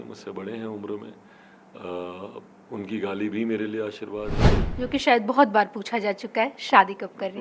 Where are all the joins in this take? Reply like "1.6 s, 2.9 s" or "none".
4.7 s